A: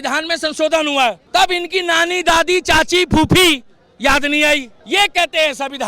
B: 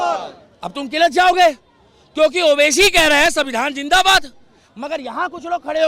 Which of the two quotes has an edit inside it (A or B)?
A